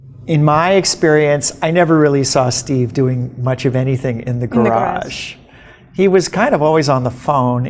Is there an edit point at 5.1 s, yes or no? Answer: no